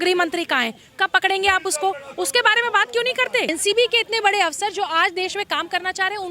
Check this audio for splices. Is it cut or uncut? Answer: cut